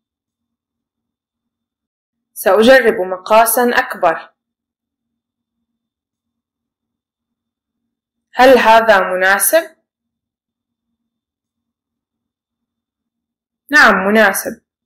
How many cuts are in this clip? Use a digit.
1